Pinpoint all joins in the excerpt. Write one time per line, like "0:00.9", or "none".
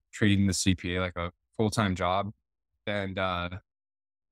0:02.8